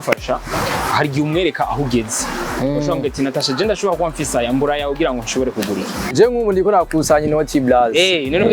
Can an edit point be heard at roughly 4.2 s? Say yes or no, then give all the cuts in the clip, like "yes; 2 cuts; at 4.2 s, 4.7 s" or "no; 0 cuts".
no; 1 cut; at 6.1 s